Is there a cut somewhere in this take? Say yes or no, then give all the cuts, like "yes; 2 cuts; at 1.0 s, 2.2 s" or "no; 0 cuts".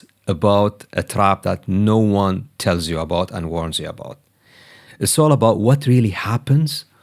no; 0 cuts